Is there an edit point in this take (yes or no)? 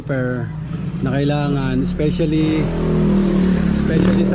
no